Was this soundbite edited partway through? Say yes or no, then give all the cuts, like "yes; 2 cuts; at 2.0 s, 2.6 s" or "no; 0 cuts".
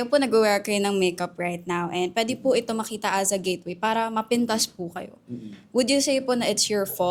no; 0 cuts